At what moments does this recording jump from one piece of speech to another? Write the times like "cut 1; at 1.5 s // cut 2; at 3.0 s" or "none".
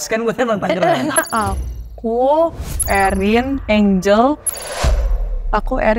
cut 1; at 1.1 s